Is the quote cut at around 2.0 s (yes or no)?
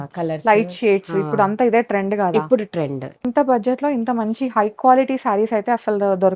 no